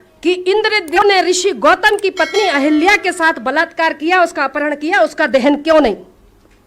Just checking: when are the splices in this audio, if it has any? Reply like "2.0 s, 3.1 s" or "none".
1.0 s